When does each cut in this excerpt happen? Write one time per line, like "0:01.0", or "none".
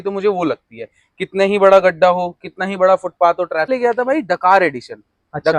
0:03.7